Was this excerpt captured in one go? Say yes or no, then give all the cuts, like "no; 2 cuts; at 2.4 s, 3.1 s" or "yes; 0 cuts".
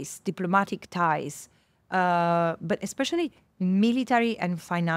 yes; 0 cuts